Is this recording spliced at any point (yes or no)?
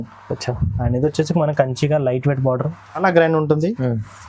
yes